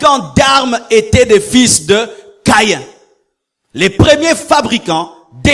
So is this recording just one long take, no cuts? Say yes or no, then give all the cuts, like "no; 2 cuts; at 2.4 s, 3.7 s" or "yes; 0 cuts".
yes; 0 cuts